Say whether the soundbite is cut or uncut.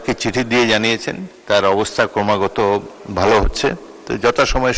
uncut